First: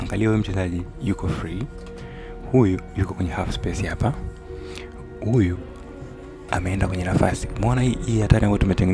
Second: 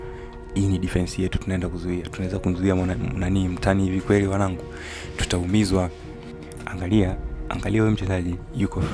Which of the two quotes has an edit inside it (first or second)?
second